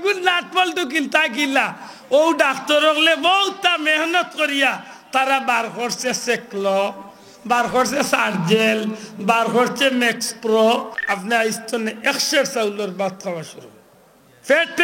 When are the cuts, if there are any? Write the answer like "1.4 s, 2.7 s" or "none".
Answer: 11.0 s